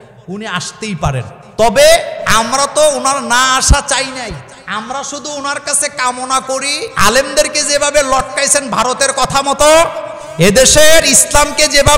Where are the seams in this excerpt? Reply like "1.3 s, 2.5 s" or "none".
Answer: 1.4 s, 2.2 s, 4.5 s, 6.9 s